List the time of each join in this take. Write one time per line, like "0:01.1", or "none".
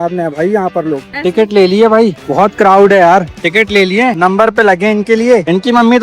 0:01.1
0:03.4